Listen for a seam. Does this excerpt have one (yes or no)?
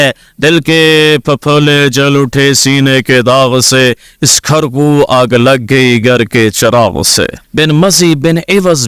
yes